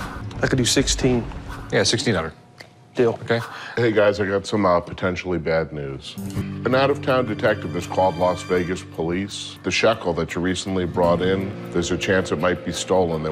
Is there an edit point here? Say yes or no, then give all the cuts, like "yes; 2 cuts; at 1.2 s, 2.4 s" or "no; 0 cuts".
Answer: yes; 1 cut; at 3.6 s